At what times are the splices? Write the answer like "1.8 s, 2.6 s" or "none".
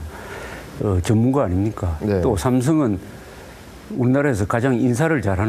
3.2 s